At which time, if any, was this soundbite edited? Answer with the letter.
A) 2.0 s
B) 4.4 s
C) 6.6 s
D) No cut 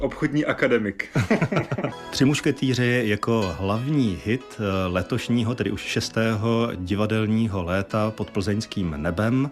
A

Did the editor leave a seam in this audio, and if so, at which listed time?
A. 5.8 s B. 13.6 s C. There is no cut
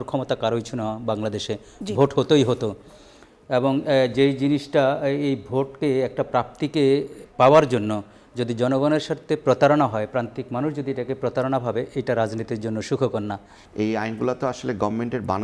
B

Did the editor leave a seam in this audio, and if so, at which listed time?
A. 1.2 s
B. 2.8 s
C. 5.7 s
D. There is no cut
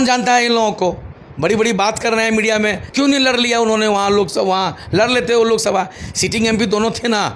B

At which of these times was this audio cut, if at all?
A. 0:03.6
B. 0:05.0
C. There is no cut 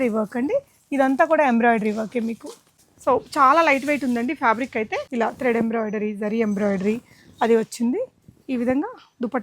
B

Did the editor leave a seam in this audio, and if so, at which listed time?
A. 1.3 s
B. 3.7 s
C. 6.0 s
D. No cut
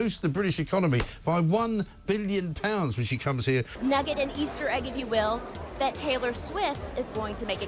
B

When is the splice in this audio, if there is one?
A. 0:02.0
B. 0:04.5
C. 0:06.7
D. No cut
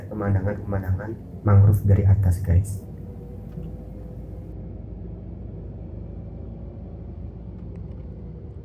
D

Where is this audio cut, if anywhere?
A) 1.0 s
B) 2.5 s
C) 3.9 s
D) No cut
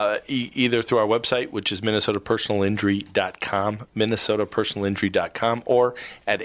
D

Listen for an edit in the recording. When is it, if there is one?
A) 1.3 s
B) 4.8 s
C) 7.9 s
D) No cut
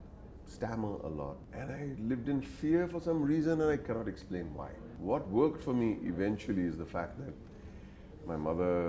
D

